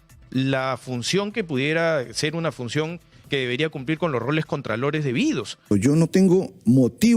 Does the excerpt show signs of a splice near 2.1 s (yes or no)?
no